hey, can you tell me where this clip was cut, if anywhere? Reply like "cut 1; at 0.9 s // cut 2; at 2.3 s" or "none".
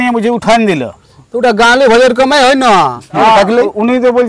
cut 1; at 3.2 s